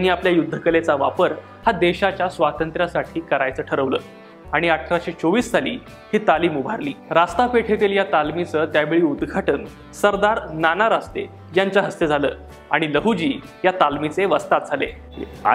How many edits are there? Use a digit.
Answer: 0